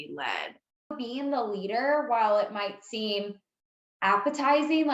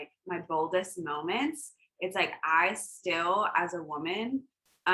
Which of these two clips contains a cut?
first; 1 cut; at 0.9 s

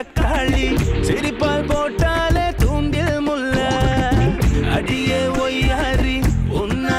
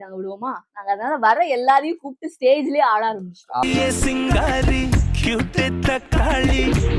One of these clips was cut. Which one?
second; 1 cut; at 3.7 s

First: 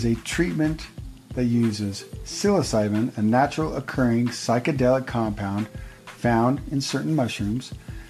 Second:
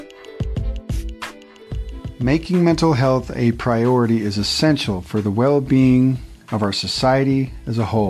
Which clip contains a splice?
second; 1 cut; at 2.1 s

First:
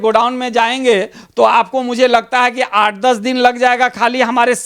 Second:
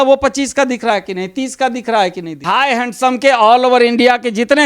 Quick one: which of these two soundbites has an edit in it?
second; 1 cut; at 2.5 s

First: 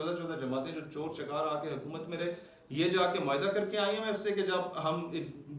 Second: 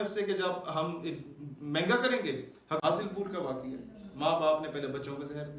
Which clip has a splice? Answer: second; 1 cut; at 2.8 s

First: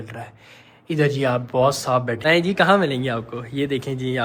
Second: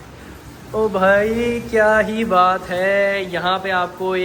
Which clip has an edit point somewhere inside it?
first; 1 cut; at 2.2 s

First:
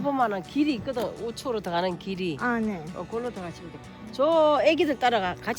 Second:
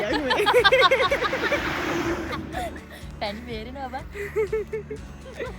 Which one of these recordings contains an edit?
second; 1 cut; at 2.7 s

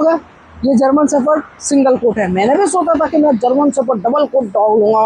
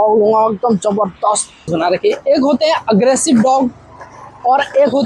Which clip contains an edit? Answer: second; 1 cut; at 1.7 s

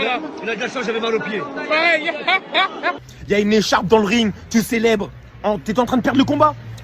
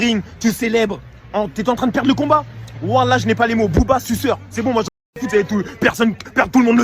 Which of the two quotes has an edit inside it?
first; 1 cut; at 3.0 s

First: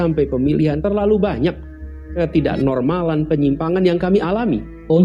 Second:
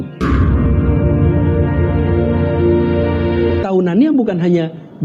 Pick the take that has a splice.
second; 1 cut; at 3.6 s

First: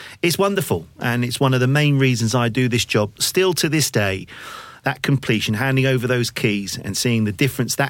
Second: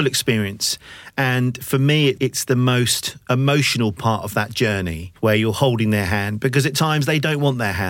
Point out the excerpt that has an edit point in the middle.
second; 1 cut; at 5.0 s

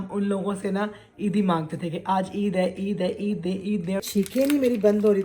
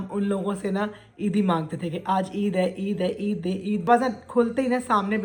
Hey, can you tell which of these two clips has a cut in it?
first; 1 cut; at 3.8 s

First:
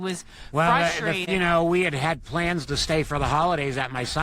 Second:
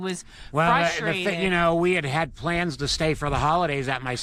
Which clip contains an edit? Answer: first; 1 cut; at 1.2 s

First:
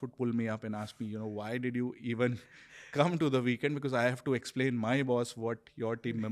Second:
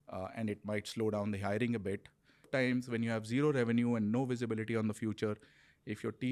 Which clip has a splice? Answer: second; 1 cut; at 2.5 s

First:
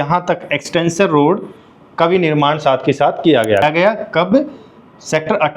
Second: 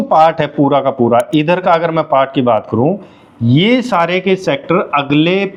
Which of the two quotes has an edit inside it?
first; 1 cut; at 3.6 s

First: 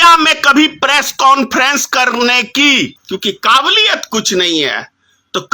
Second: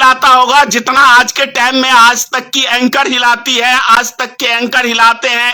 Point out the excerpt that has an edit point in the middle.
first; 1 cut; at 3.0 s

